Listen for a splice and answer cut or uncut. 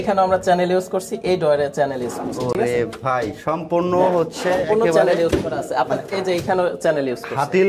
uncut